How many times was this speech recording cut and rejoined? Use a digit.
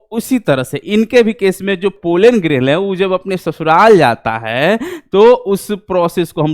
1